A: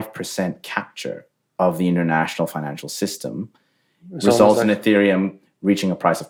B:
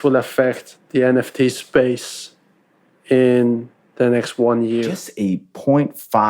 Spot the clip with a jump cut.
B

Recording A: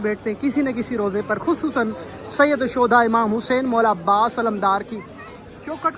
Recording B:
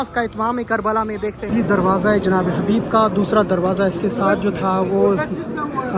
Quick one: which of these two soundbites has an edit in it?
B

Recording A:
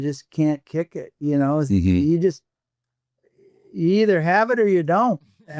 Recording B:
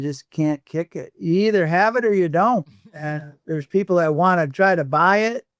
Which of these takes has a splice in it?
B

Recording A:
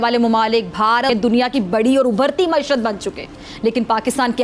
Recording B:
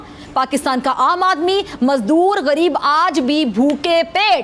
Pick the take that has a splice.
A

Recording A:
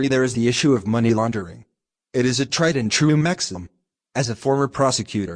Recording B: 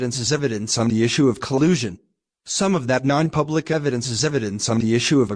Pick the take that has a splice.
B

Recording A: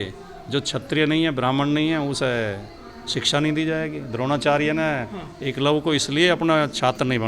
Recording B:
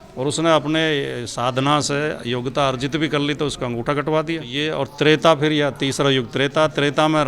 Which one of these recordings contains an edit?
B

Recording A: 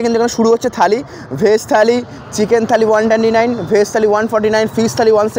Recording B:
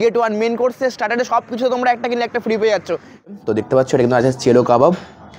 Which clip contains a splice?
B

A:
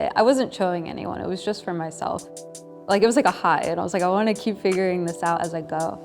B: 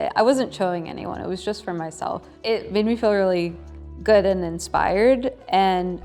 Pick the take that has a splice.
A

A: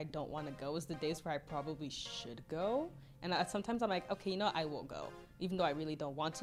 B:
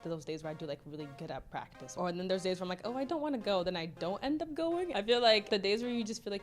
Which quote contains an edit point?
B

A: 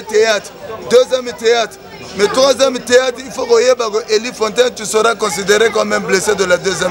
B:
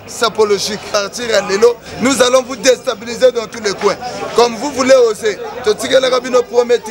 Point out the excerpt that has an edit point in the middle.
B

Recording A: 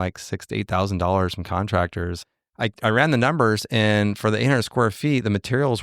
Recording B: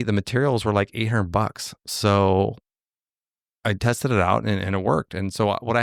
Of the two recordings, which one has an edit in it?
A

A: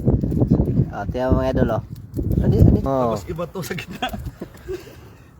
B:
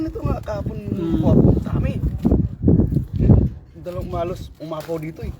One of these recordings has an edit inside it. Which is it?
A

